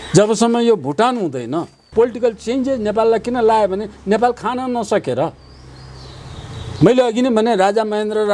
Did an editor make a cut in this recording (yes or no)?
yes